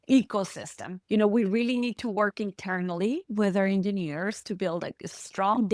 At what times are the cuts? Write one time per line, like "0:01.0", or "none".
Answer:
0:00.9